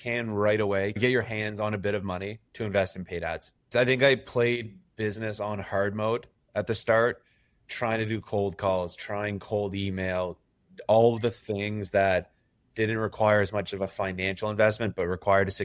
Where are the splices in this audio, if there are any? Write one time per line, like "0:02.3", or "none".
0:01.0
0:03.5